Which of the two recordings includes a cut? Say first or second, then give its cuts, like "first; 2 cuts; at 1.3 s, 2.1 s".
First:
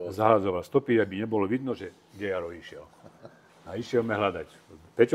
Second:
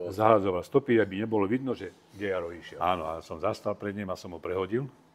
second; 1 cut; at 2.6 s